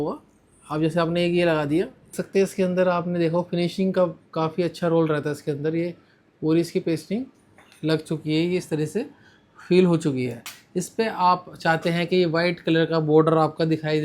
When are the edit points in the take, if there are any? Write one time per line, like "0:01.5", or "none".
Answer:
0:02.2